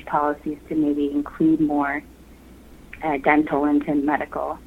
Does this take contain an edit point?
no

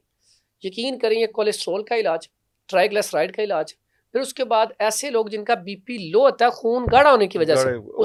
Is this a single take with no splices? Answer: yes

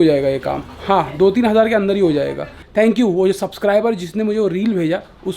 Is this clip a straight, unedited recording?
no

